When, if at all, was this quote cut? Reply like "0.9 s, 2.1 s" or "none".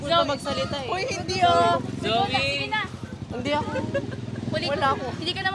none